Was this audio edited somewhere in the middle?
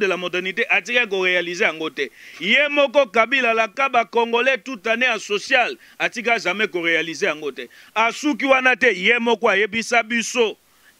no; 0 cuts

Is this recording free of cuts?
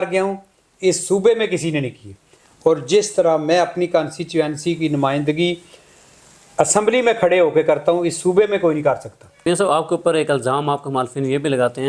no; 1 cut; at 9.4 s

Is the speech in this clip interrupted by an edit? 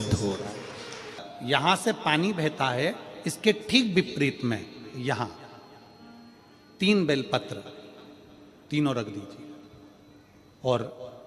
no; 0 cuts

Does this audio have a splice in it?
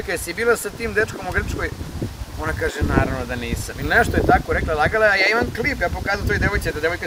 no; 0 cuts

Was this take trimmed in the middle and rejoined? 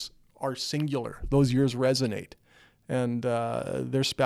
no; 0 cuts

